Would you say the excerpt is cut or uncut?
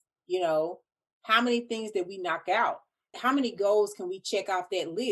cut